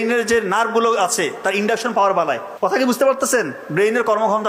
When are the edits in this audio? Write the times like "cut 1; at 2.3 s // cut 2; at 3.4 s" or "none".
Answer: cut 1; at 2.7 s